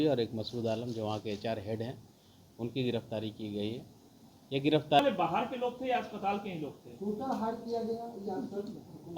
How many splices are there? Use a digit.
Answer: 1